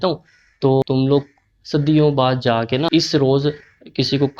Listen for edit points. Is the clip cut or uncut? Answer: cut